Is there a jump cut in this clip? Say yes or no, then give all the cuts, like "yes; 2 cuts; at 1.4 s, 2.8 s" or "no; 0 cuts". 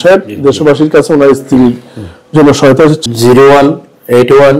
yes; 1 cut; at 3.0 s